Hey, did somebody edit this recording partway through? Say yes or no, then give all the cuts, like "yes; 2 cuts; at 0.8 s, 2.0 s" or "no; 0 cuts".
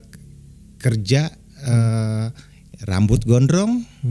no; 0 cuts